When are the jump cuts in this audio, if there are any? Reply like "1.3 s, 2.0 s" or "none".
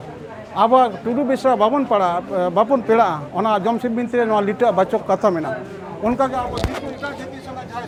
none

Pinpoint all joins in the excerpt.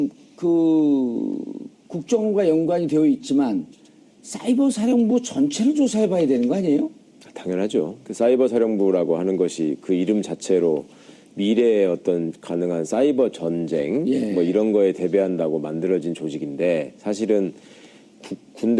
16.4 s

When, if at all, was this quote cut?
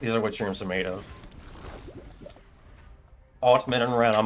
none

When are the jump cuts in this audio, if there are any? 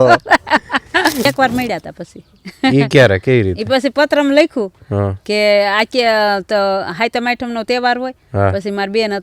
1.3 s

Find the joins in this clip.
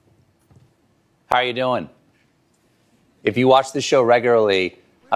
none

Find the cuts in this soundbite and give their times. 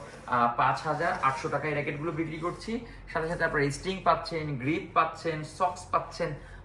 none

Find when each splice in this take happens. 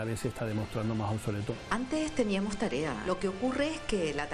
1.6 s, 3.0 s

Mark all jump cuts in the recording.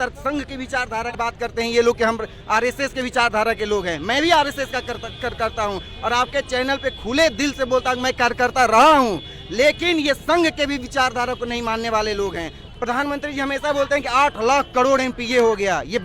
1.1 s, 12.6 s

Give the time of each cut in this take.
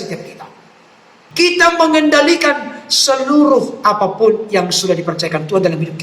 1.2 s

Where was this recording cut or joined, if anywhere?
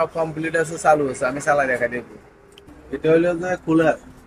2.7 s

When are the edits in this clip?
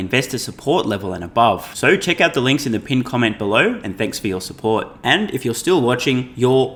none

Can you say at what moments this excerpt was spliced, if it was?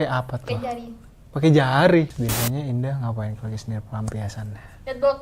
2.1 s

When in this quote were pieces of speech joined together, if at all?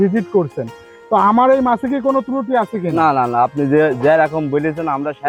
none

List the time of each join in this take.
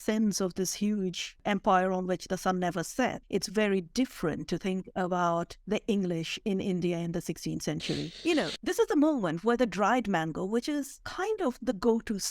1.4 s, 3.2 s, 8.1 s

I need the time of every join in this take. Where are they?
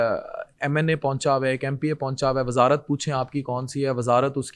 none

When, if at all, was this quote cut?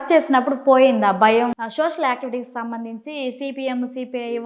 1.5 s

